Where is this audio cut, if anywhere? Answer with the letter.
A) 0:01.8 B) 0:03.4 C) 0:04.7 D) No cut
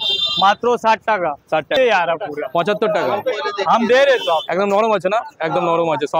A